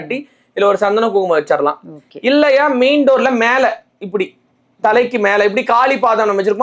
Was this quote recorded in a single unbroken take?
yes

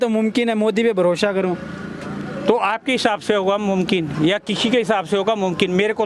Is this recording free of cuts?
yes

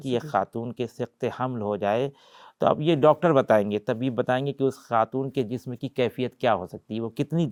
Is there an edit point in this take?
no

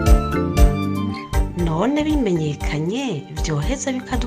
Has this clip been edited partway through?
yes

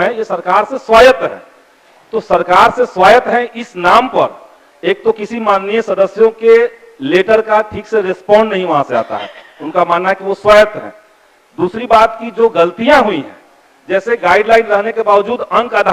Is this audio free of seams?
yes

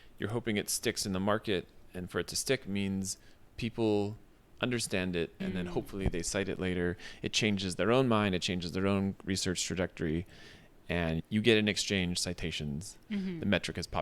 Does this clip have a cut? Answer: yes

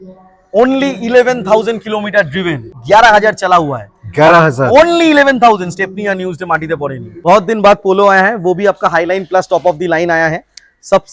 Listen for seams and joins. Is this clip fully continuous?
no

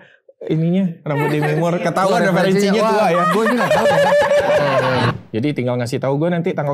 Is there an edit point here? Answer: yes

